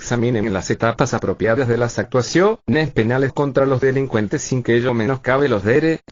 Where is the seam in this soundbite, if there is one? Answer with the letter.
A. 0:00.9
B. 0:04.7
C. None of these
C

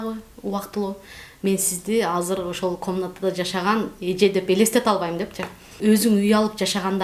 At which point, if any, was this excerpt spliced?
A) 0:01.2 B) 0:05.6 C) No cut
B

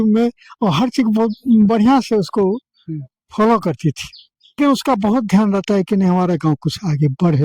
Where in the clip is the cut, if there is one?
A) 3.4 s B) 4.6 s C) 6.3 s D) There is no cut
B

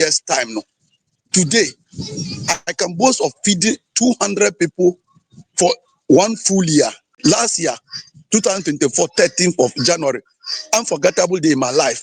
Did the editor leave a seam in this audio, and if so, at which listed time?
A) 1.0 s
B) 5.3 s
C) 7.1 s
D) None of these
C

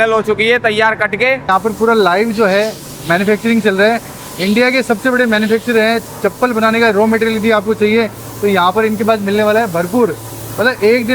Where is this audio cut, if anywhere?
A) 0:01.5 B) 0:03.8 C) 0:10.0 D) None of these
A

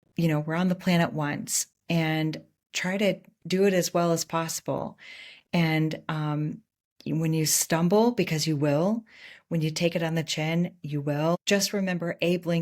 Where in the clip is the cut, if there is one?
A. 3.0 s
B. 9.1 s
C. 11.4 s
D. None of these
C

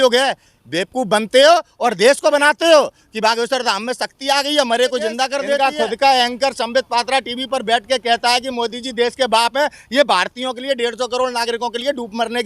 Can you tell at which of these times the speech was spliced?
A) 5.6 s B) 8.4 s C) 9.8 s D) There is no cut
A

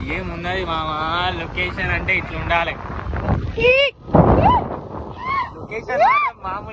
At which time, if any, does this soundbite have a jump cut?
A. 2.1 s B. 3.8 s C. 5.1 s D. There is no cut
D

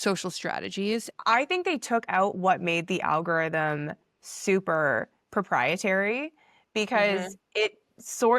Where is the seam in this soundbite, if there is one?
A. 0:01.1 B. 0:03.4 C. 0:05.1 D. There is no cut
A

